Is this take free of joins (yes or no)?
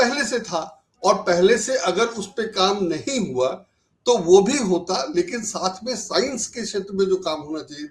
yes